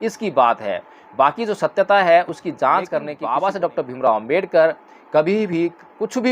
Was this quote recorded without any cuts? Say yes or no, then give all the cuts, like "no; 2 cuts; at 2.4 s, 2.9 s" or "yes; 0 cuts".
no; 1 cut; at 3.1 s